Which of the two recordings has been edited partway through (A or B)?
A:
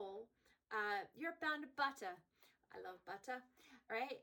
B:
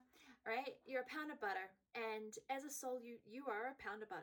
B